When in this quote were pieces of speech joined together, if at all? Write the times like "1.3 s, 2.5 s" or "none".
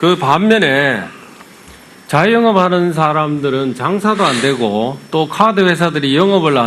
2.4 s